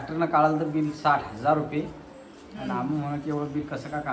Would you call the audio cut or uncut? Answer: uncut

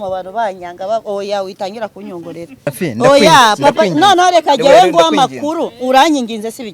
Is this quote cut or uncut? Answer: cut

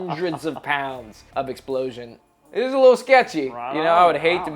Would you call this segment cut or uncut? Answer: cut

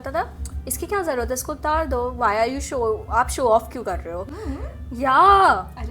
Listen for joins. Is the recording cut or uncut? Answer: uncut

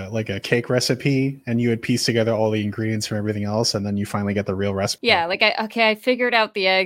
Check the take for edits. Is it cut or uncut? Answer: cut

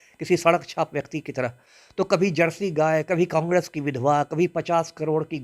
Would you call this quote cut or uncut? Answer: uncut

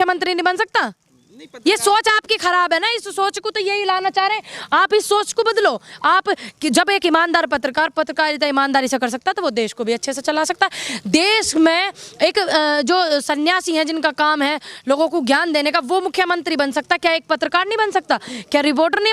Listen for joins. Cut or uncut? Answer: uncut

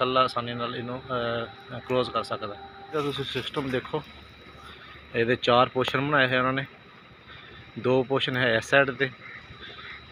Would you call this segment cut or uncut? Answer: cut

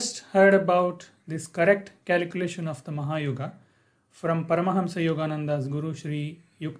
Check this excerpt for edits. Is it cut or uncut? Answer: uncut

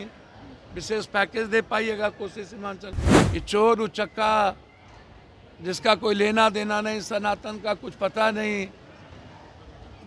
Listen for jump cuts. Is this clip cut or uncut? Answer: cut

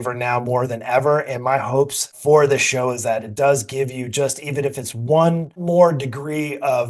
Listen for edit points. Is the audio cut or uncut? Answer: cut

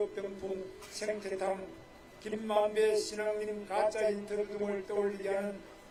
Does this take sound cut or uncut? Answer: uncut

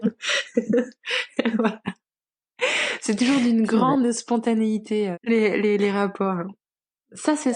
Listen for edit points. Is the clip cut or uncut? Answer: cut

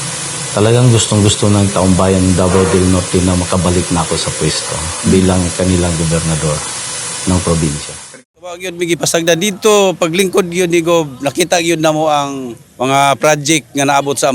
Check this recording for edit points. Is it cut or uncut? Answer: cut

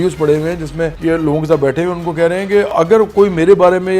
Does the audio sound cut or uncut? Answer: cut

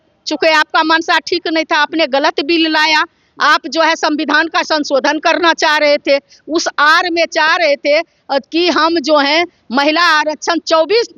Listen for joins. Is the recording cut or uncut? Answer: uncut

